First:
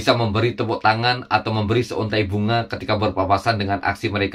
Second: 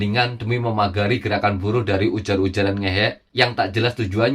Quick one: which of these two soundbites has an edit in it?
second; 1 cut; at 3.2 s

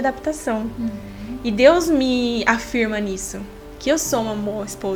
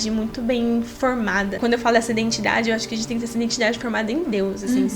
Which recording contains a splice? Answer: second; 1 cut; at 1.6 s

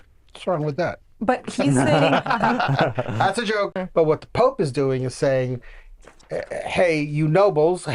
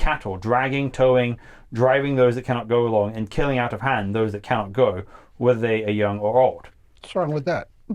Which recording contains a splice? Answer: first; 1 cut; at 3.7 s

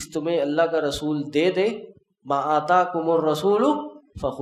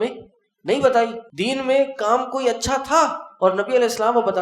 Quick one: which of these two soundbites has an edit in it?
second; 1 cut; at 1.2 s

